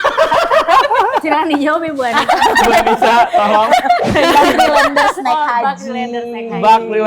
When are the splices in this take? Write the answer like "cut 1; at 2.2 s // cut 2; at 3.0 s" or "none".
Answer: cut 1; at 4.1 s